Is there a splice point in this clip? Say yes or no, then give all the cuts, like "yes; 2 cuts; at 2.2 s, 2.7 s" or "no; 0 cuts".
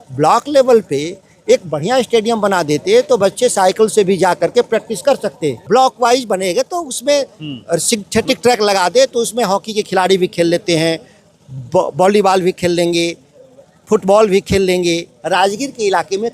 yes; 2 cuts; at 5.6 s, 15.1 s